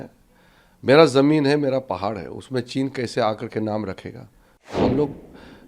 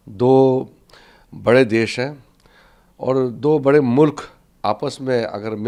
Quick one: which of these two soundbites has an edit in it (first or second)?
first